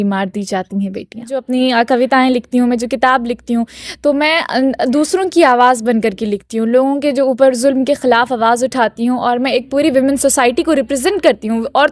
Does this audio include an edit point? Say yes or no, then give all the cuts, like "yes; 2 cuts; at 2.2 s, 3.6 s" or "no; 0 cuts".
yes; 1 cut; at 1.5 s